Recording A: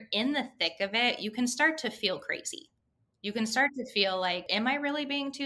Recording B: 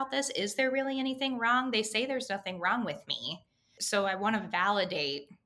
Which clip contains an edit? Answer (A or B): A